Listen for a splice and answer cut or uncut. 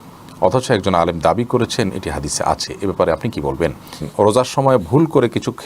cut